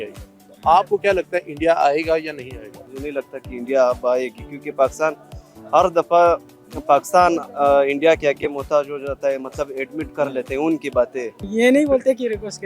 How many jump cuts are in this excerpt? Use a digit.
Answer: 2